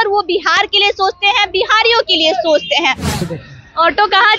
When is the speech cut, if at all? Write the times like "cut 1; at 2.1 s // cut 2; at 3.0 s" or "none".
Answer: cut 1; at 3.1 s